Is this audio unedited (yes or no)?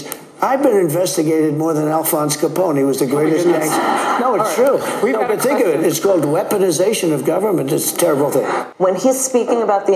no